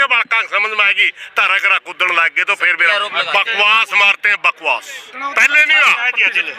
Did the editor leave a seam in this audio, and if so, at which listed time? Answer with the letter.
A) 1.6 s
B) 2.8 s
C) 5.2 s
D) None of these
B